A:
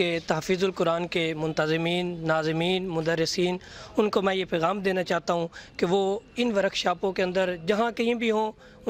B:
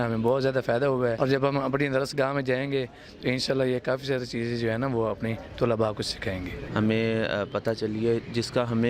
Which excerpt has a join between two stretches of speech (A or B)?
B